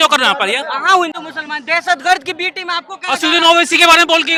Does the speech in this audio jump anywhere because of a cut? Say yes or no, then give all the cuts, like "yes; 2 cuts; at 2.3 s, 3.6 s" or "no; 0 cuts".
no; 0 cuts